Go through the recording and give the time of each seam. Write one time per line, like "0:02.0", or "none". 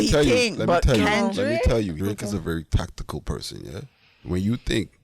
0:01.9
0:04.1